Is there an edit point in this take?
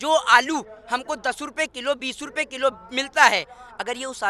no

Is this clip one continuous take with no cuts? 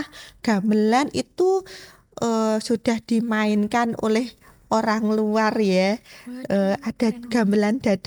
yes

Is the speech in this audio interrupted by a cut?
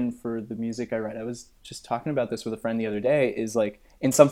no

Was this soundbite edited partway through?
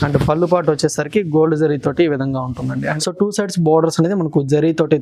yes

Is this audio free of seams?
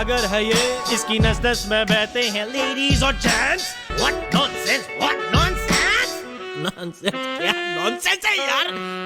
no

